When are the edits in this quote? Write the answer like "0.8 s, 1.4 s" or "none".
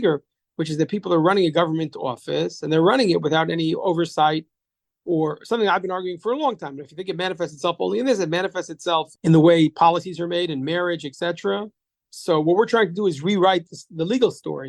none